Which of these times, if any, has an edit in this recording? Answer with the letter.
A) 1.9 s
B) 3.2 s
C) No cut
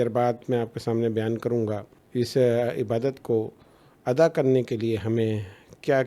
A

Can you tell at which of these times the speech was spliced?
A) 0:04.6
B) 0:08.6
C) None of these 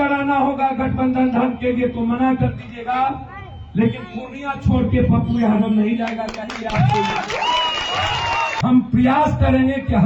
B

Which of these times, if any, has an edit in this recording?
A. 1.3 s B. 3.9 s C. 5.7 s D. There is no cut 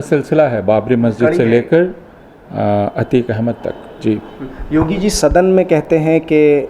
D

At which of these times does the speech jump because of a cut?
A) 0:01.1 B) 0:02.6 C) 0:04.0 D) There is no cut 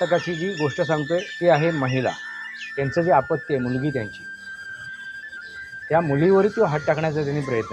B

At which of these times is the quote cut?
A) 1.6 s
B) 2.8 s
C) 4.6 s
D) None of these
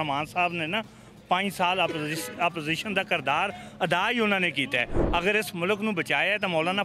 D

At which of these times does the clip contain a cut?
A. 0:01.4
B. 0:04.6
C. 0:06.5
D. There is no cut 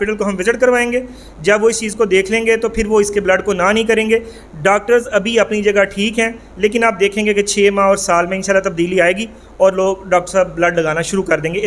D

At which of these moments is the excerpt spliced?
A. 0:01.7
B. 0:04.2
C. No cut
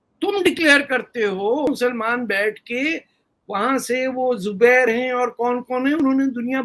A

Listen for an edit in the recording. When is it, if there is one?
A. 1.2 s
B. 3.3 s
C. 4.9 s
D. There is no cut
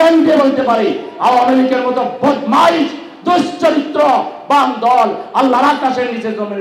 D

